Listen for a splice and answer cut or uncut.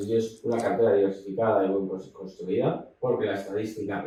uncut